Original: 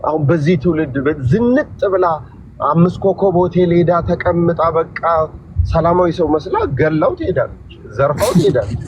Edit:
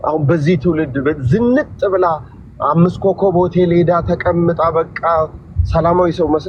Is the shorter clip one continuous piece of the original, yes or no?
yes